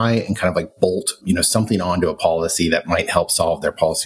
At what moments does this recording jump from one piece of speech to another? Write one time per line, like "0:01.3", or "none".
0:01.2